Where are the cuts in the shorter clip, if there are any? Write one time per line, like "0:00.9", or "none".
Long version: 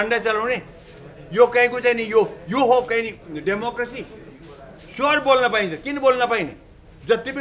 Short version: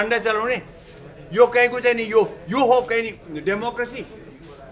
none